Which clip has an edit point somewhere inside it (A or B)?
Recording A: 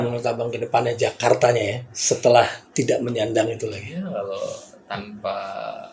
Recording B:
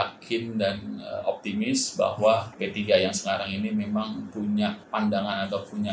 B